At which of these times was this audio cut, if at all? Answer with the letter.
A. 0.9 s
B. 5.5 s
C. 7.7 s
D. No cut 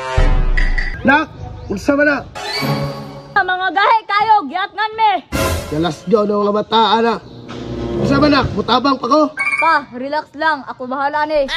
A